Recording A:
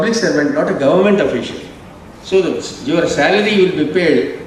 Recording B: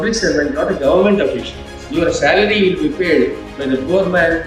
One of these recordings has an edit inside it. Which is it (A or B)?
B